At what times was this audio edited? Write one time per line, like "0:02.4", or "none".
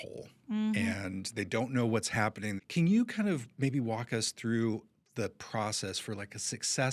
0:02.6